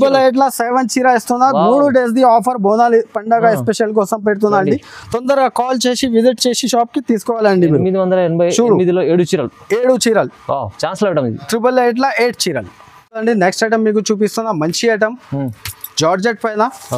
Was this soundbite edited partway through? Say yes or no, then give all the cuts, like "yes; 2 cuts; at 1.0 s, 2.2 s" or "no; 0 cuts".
no; 0 cuts